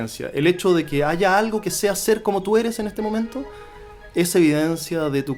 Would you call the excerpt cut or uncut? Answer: uncut